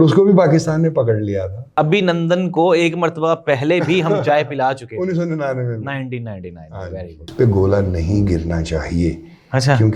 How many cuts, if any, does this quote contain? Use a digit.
2